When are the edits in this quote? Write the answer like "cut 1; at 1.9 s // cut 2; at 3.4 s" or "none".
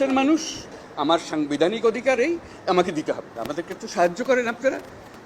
cut 1; at 3.3 s